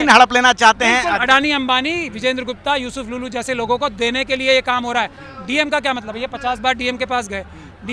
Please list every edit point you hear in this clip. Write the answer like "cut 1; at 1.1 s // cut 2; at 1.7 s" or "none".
none